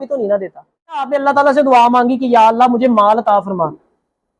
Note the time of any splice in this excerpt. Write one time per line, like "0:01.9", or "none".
0:01.1